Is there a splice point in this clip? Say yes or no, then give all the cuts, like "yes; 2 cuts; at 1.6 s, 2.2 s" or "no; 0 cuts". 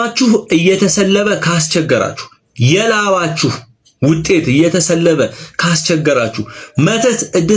no; 0 cuts